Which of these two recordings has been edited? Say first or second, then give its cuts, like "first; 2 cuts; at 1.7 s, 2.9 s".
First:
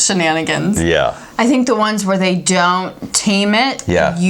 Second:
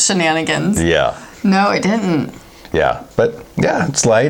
first; 1 cut; at 1.3 s